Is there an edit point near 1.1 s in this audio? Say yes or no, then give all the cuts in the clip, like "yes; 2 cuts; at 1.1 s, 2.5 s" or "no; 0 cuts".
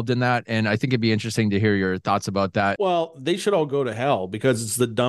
no; 1 cut; at 2.7 s